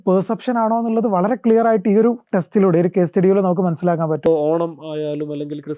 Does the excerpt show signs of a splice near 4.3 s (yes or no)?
yes